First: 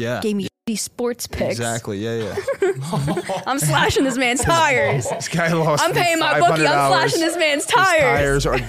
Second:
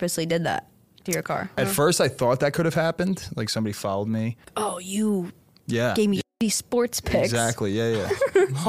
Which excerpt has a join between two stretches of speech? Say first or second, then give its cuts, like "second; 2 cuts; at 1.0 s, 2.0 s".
second; 2 cuts; at 1.6 s, 4.4 s